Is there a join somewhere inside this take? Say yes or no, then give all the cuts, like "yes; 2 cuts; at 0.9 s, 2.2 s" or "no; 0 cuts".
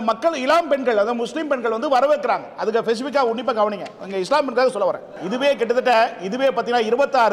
yes; 1 cut; at 5.2 s